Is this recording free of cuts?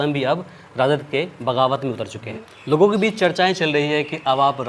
no; 1 cut; at 2.3 s

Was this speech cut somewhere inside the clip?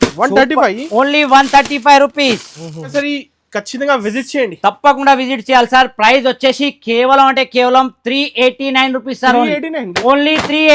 yes; 1 cut; at 2.9 s

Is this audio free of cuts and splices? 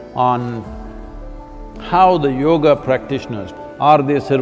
no; 1 cut; at 3.4 s

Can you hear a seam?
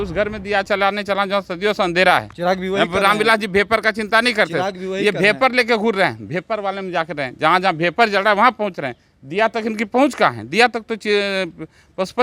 no; 0 cuts

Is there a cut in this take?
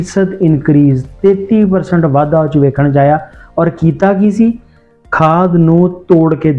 no; 0 cuts

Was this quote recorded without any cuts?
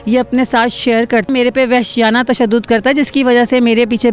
no; 1 cut; at 1.3 s

